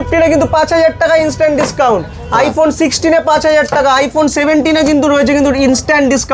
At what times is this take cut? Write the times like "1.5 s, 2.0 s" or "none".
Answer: none

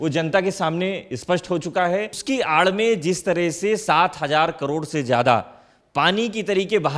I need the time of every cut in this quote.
2.2 s

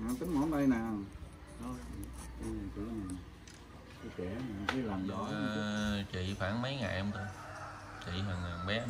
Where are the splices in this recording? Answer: 5.5 s

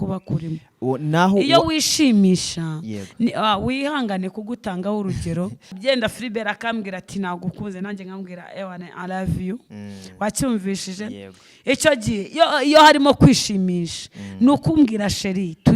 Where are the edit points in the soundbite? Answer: 5.7 s

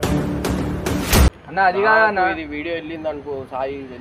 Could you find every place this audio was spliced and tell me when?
1.3 s

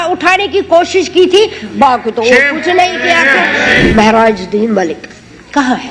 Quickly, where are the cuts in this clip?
3.9 s

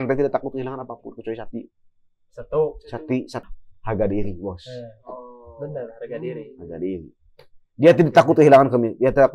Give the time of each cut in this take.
3.4 s

